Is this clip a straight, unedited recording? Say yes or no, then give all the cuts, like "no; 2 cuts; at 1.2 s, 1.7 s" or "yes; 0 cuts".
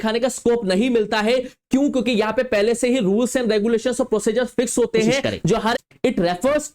no; 1 cut; at 5.7 s